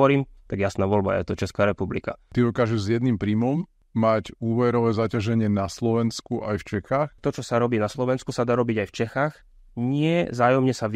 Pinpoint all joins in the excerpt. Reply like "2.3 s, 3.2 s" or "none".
2.3 s, 3.8 s, 7.2 s